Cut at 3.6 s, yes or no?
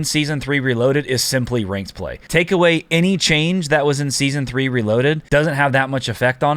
no